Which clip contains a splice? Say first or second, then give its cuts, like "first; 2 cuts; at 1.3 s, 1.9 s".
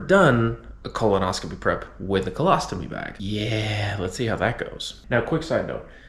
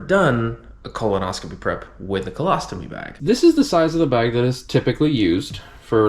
second; 1 cut; at 3.2 s